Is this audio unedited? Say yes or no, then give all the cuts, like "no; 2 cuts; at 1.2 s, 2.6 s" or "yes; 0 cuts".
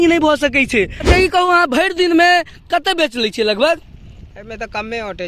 no; 1 cut; at 1.0 s